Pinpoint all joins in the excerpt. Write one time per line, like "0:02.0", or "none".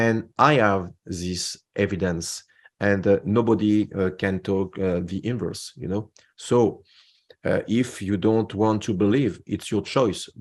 none